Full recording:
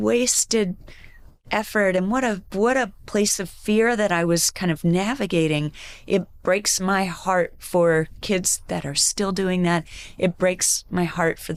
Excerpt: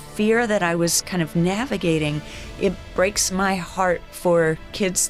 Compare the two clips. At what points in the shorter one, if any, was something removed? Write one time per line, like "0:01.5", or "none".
none